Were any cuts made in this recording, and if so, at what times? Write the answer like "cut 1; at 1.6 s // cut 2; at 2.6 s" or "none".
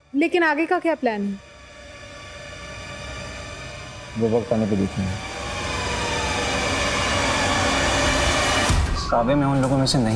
cut 1; at 8.9 s